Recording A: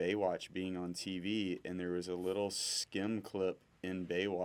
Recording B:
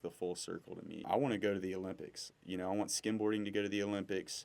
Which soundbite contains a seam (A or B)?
B